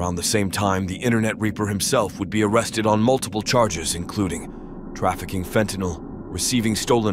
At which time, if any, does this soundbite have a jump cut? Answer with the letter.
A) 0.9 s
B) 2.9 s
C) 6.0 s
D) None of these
D